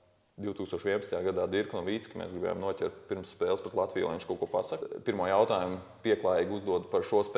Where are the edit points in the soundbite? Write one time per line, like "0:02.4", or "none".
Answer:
0:04.8